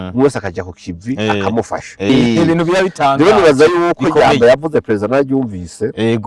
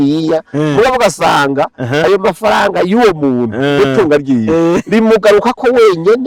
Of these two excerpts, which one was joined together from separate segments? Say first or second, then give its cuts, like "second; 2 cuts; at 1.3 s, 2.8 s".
first; 1 cut; at 2.1 s